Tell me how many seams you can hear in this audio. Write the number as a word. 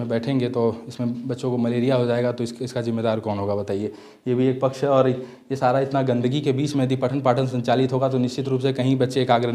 zero